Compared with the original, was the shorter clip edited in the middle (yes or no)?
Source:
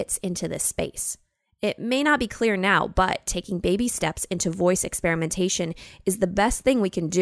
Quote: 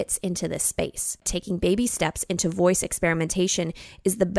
yes